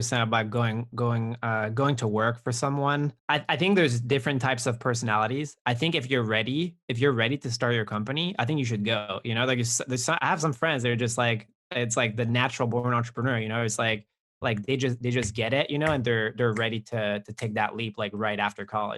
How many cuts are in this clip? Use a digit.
1